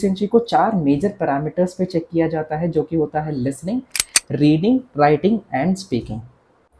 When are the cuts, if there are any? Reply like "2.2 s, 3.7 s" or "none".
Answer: none